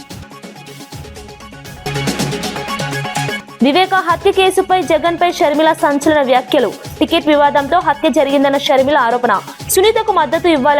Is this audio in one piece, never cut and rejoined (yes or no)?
no